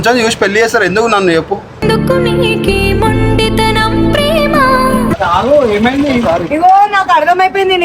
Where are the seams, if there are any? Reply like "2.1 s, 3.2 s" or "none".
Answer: 5.1 s